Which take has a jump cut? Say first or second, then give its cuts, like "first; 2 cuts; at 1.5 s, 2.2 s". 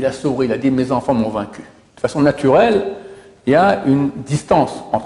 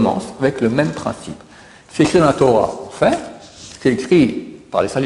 first; 1 cut; at 1.8 s